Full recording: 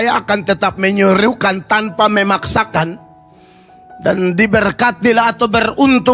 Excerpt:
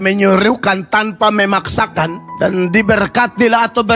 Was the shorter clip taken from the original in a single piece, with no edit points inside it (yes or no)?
no